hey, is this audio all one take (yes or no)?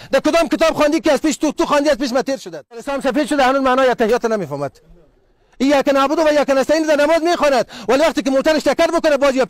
no